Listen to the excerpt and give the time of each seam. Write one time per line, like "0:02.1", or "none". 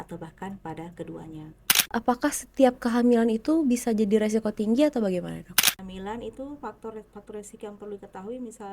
0:01.9
0:05.6